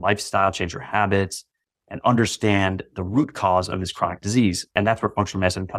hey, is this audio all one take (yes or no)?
no